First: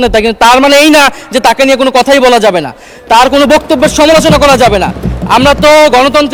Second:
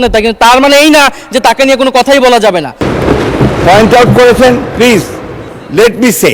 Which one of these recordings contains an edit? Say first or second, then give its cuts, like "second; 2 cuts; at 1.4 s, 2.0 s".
second; 1 cut; at 2.9 s